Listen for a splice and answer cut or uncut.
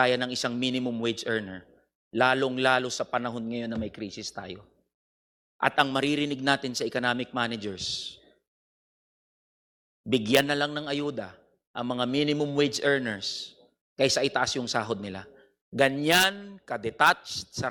uncut